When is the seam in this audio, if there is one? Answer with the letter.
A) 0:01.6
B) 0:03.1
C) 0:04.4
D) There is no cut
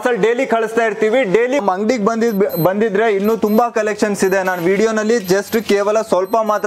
A